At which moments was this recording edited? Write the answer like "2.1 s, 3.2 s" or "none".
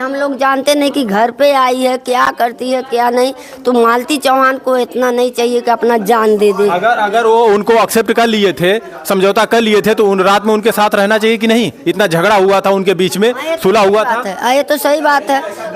none